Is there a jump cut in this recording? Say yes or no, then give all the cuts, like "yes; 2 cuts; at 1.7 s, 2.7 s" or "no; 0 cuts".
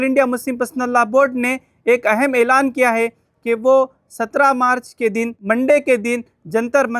yes; 1 cut; at 5.4 s